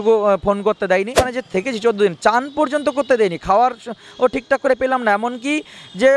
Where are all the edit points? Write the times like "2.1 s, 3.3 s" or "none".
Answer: 1.2 s

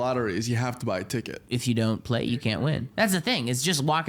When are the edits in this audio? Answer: 1.4 s, 2.9 s

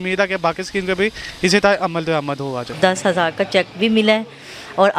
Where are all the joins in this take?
2.6 s

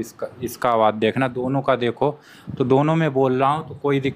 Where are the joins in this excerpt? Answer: none

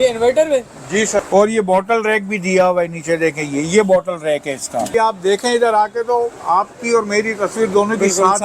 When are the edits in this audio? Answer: 1.2 s, 4.9 s

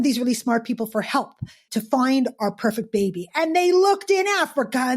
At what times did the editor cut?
1.7 s

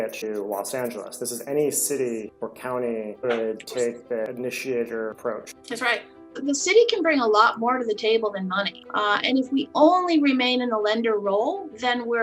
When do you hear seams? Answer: 6.2 s

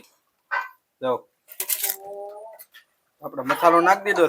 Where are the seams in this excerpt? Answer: 1.5 s

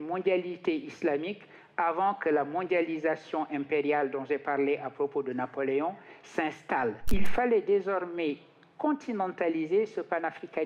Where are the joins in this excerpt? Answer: 7.0 s

